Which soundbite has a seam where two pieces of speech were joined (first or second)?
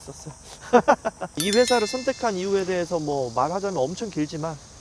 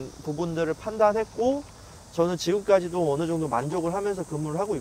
first